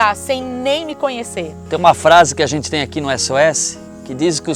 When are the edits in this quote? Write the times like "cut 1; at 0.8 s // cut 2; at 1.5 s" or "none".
cut 1; at 1.7 s